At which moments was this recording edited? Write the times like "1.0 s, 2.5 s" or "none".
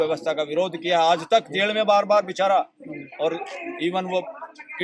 none